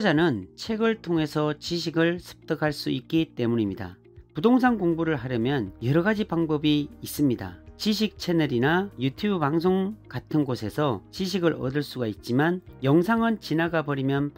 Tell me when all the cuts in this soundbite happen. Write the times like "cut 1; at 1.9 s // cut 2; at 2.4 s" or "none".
none